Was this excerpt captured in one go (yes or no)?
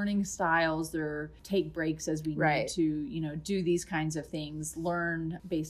no